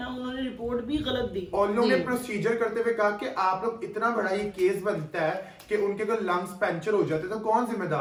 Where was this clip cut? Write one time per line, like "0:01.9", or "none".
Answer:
none